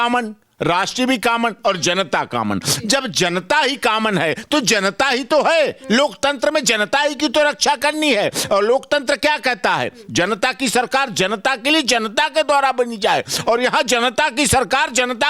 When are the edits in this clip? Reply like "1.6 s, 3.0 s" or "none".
none